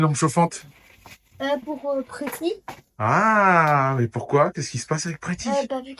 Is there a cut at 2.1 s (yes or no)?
no